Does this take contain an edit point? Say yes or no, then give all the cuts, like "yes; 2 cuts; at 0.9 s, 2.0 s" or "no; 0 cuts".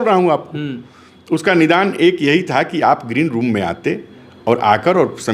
no; 0 cuts